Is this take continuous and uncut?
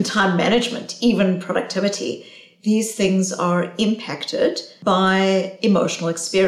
no; 1 cut; at 4.7 s

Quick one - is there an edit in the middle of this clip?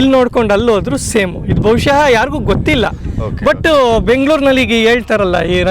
no; 0 cuts

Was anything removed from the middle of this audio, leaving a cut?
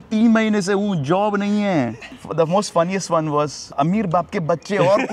yes; 2 cuts; at 2.0 s, 3.7 s

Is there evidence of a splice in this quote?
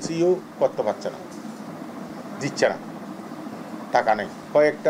no; 0 cuts

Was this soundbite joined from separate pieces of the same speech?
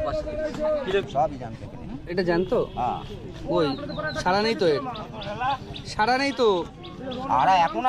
yes; 1 cut; at 1.1 s

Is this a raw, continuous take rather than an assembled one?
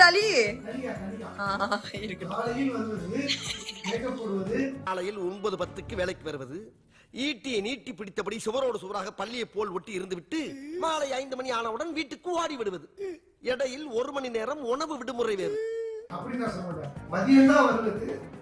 yes; 0 cuts

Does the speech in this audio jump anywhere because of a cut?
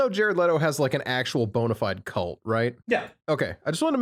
no; 0 cuts

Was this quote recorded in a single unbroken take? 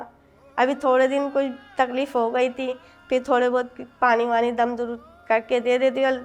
yes; 0 cuts

